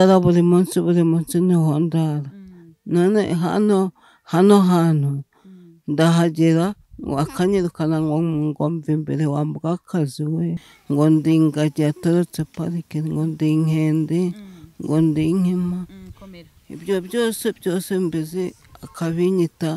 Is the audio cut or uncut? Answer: cut